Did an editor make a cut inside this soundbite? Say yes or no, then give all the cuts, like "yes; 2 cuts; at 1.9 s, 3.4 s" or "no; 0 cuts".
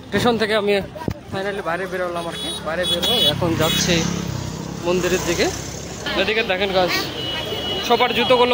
yes; 1 cut; at 6.0 s